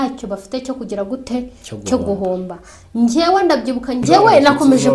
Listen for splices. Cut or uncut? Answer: cut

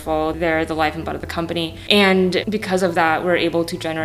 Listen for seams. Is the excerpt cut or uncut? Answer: cut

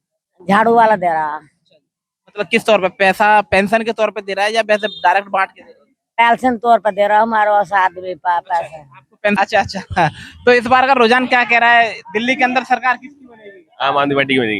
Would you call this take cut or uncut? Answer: cut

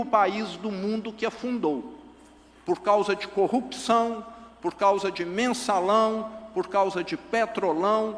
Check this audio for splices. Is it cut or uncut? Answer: uncut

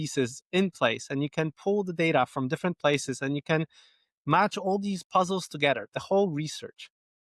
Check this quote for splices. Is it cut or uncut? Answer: uncut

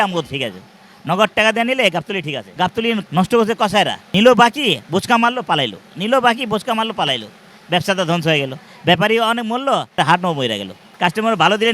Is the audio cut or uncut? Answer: cut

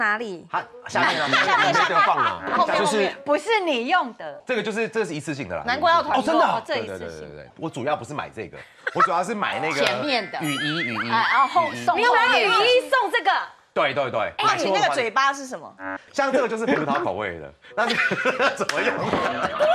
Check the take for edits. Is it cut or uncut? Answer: uncut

